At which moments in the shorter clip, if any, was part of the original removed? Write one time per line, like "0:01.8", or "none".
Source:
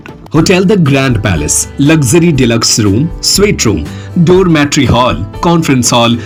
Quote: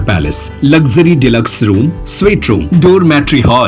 0:02.6